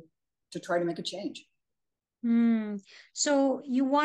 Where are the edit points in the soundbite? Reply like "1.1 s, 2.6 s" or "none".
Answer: none

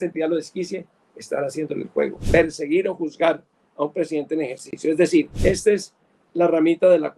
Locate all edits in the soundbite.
2.2 s, 5.3 s

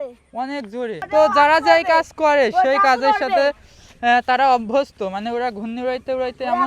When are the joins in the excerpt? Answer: 1.1 s

